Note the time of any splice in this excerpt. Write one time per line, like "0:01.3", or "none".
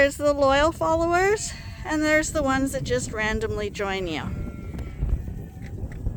none

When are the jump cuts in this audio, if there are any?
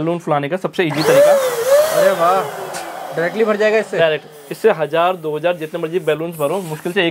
none

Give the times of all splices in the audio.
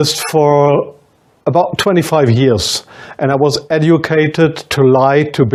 none

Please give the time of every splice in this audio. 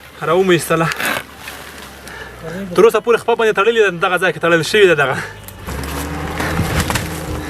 0:05.6

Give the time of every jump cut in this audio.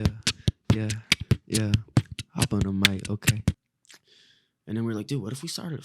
0:03.7

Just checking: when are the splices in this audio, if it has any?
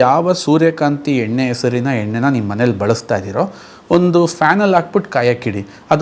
none

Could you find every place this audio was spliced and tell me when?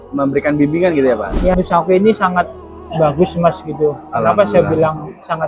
0:01.5

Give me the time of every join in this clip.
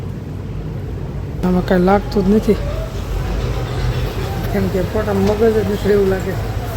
0:01.4

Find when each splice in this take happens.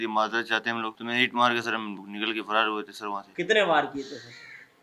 0:01.0
0:03.3

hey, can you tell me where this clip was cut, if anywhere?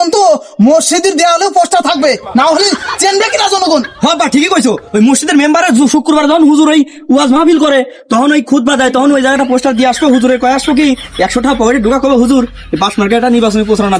none

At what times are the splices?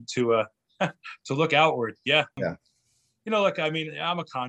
0:02.4

